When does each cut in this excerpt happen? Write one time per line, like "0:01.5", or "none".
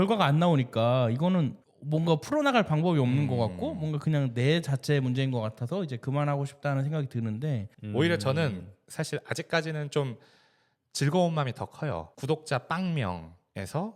0:07.7
0:12.1

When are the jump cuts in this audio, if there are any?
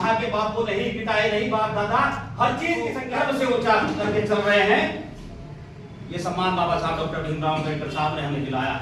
0:03.0

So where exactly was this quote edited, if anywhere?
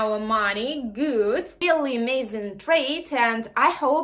0:01.6

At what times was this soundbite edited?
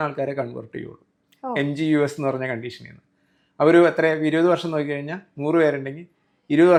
none

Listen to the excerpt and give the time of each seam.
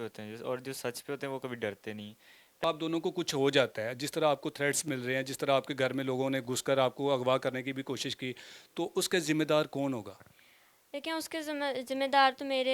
0:02.6

